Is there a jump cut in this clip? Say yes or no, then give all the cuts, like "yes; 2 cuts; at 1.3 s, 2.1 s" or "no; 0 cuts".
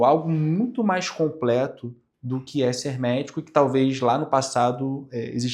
no; 0 cuts